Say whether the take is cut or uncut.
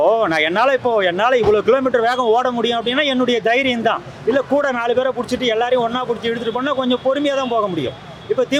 uncut